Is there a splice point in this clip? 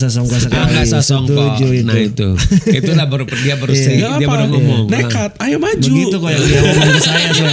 no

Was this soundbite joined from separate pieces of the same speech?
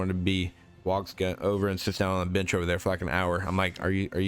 no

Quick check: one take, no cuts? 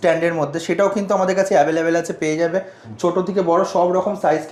yes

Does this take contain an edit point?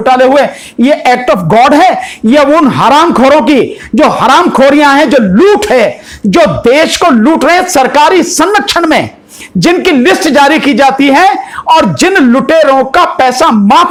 no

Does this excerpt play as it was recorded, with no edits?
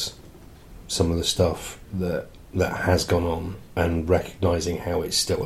yes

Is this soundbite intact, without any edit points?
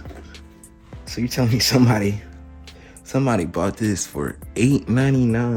yes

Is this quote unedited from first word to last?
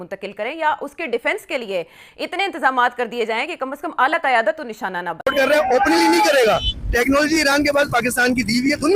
no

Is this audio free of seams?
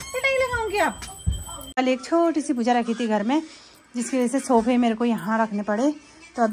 no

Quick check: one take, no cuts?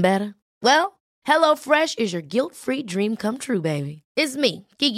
yes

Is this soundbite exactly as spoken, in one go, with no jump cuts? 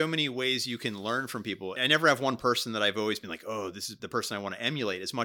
no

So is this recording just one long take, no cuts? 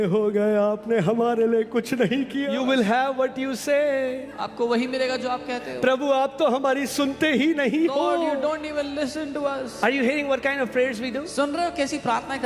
no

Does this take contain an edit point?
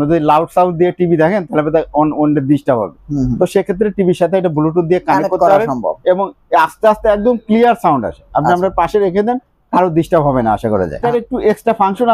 yes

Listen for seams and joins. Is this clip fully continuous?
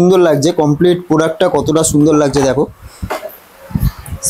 yes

